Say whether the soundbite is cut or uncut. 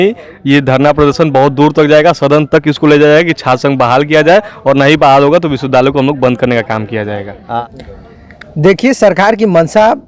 cut